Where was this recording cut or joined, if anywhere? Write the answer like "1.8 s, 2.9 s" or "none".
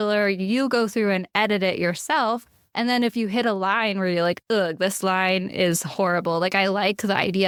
none

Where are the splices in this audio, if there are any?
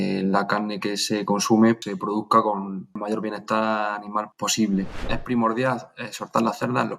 1.8 s, 3.0 s, 4.3 s, 5.1 s

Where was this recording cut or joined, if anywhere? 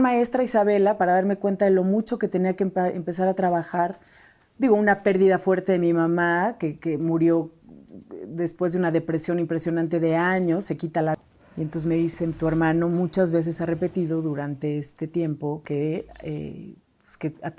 11.1 s

